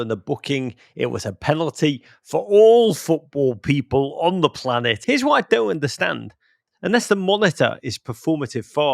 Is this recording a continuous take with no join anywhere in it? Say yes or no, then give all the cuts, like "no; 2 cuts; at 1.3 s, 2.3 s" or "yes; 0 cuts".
no; 2 cuts; at 5.0 s, 6.6 s